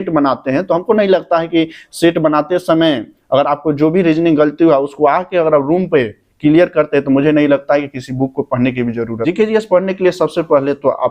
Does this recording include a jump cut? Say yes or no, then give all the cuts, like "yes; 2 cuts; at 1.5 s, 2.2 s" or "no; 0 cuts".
yes; 1 cut; at 9.2 s